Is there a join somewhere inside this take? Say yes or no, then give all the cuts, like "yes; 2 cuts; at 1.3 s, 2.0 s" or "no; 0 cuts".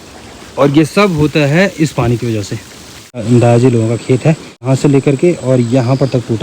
yes; 2 cuts; at 3.2 s, 4.7 s